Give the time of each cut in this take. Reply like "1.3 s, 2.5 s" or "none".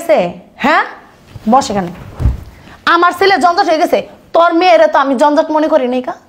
none